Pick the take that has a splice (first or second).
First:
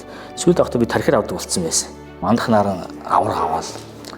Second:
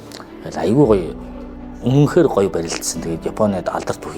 first